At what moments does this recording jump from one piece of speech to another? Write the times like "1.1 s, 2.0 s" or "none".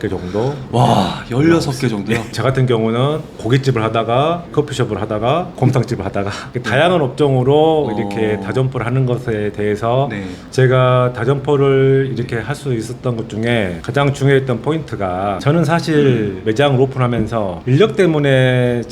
2.3 s, 10.4 s, 15.4 s